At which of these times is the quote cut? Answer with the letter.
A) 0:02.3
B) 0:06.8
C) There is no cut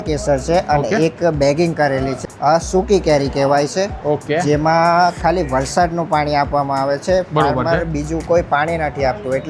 A